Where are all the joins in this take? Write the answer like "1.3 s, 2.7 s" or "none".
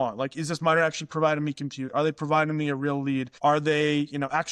3.3 s